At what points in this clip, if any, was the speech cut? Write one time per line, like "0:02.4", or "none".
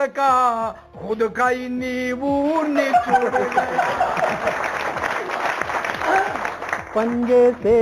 0:06.8